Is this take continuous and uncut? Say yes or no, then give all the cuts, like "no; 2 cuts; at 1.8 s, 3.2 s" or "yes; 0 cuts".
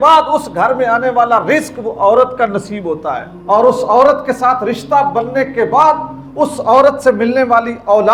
yes; 0 cuts